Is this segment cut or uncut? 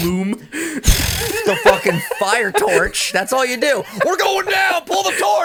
uncut